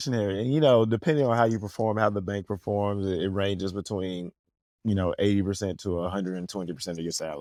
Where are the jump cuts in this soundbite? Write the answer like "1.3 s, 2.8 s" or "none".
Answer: none